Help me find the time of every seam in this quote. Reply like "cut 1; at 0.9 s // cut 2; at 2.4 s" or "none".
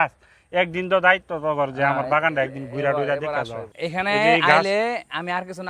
cut 1; at 3.6 s